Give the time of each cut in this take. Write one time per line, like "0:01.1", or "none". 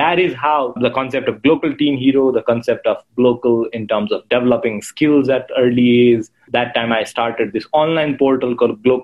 0:00.7
0:06.5

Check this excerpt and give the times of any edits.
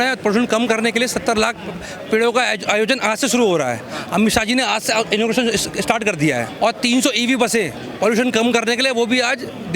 0:06.5
0:07.8

